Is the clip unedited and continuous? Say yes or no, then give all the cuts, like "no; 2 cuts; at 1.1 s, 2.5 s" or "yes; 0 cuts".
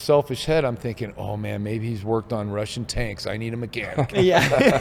yes; 0 cuts